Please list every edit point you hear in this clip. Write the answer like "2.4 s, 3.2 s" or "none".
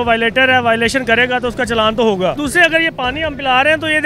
2.4 s